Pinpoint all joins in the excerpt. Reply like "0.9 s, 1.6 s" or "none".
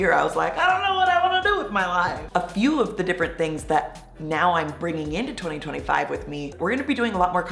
2.2 s, 6.5 s